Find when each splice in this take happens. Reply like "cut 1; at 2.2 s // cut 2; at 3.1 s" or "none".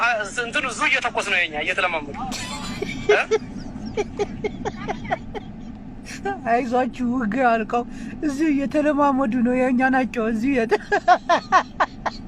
cut 1; at 2.0 s